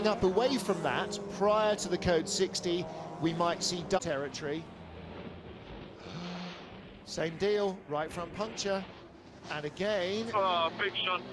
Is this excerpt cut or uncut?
cut